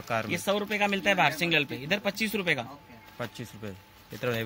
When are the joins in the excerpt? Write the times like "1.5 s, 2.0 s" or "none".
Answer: none